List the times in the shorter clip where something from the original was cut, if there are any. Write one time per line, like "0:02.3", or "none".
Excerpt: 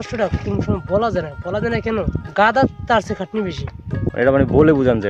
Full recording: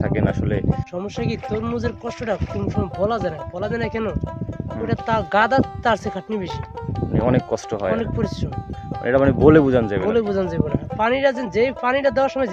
0:02.3
0:04.1